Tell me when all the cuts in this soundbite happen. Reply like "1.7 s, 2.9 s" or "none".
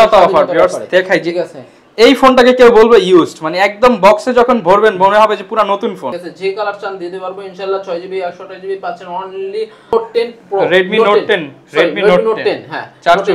6.1 s, 9.9 s